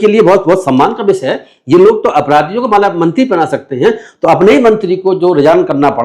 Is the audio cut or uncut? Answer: uncut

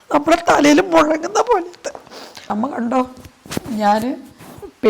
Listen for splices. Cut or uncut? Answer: cut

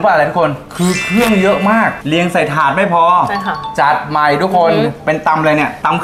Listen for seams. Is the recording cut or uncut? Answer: cut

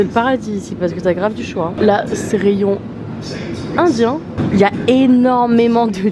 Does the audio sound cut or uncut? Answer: uncut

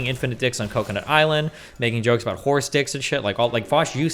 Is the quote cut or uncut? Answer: uncut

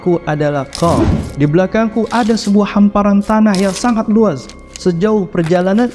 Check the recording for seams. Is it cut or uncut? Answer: cut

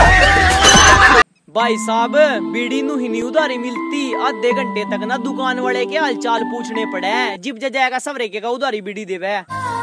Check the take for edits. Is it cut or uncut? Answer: cut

